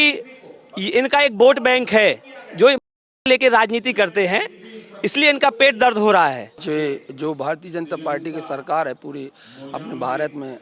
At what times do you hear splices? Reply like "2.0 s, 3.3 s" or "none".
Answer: 6.5 s